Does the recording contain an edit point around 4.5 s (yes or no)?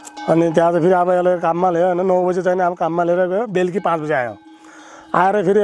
no